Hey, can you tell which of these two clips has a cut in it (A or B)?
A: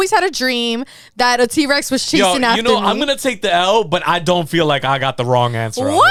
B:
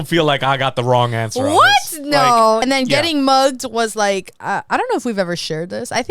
B